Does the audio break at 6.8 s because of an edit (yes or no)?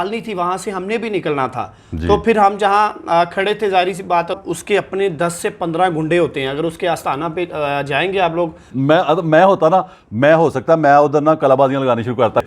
no